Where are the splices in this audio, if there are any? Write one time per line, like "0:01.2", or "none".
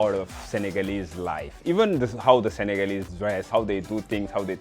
0:03.5